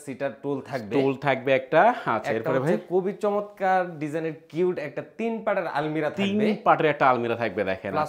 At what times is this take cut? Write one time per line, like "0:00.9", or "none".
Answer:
none